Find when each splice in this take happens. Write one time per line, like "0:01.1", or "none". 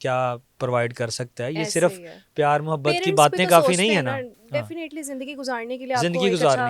none